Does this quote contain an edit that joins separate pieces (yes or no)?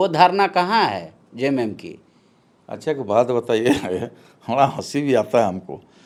no